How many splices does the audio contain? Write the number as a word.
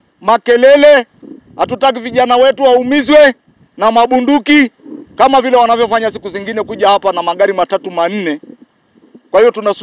zero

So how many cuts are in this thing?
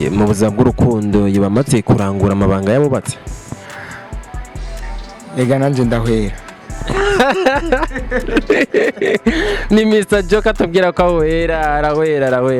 zero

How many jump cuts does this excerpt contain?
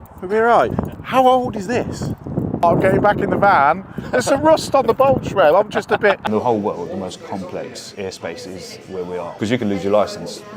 four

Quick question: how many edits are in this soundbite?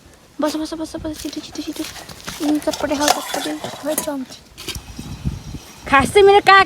one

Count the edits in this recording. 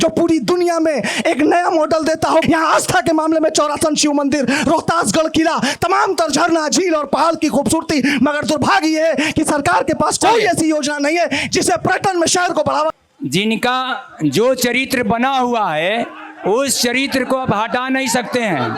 two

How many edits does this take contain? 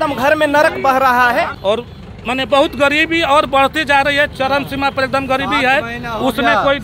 one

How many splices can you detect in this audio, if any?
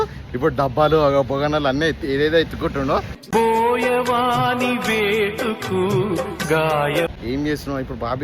one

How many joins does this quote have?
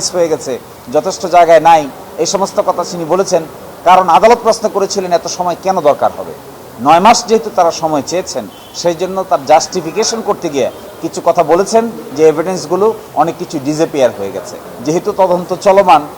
one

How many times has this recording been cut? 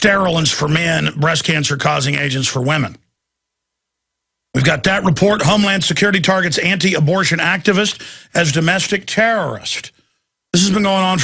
one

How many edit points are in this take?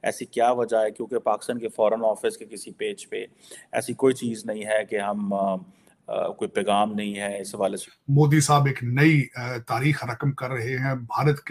one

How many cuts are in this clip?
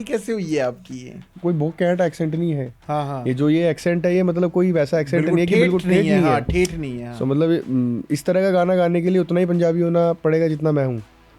one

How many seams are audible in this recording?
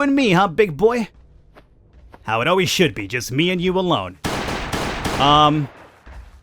one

